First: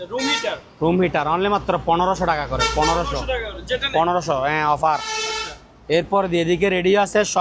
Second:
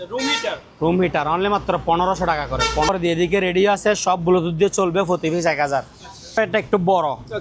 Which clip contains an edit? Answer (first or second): second